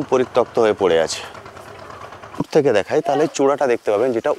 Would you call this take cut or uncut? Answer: cut